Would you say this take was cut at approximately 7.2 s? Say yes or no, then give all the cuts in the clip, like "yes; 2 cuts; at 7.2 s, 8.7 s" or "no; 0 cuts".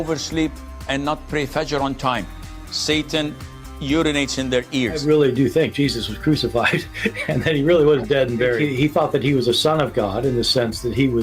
yes; 1 cut; at 7.2 s